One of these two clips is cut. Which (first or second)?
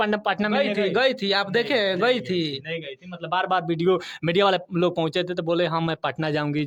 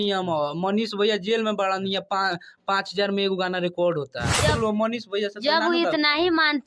second